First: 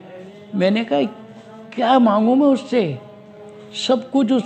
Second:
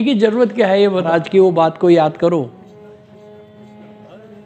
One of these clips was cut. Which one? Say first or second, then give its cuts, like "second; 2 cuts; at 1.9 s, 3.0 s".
second; 1 cut; at 1.1 s